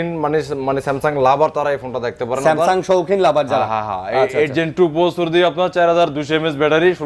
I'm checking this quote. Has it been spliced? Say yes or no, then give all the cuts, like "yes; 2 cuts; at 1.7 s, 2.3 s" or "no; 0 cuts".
no; 0 cuts